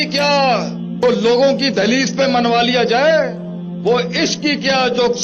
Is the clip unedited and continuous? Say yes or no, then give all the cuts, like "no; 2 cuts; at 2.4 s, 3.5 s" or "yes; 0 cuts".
no; 1 cut; at 1.0 s